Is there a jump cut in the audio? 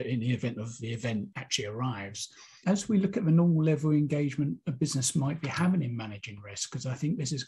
yes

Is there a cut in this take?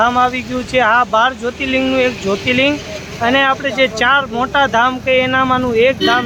no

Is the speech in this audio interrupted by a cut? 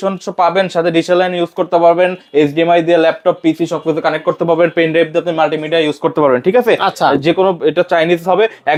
no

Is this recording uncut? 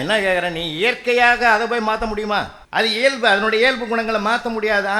no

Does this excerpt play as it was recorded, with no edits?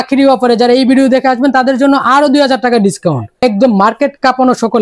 no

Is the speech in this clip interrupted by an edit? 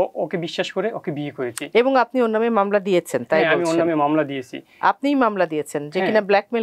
no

